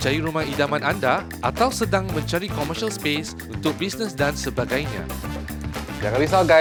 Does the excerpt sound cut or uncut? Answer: uncut